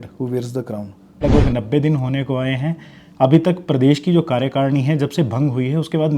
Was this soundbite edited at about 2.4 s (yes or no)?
no